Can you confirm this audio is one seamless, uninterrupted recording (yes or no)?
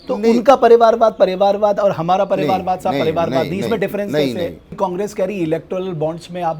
no